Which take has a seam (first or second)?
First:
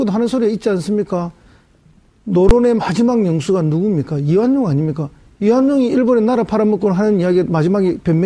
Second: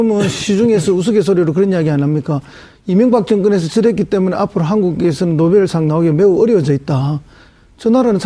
first